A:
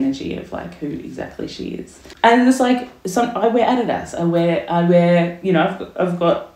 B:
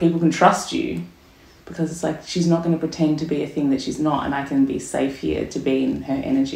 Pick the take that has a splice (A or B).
A